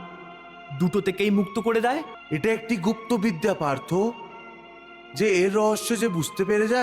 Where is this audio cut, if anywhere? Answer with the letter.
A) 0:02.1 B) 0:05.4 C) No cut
A